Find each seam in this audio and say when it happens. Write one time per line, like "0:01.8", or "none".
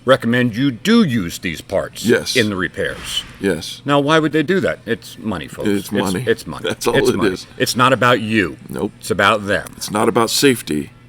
none